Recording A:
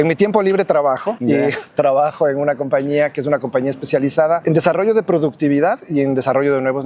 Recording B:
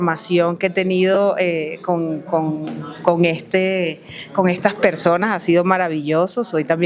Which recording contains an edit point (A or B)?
A